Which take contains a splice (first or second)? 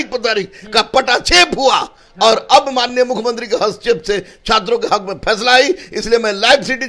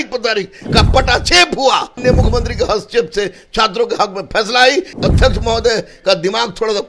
second